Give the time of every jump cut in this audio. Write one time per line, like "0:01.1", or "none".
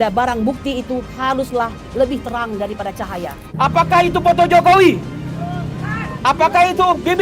0:03.4